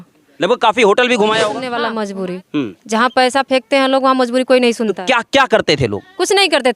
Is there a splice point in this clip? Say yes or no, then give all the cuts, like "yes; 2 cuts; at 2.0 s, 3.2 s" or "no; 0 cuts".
yes; 1 cut; at 1.7 s